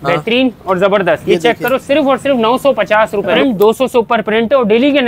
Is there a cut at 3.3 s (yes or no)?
yes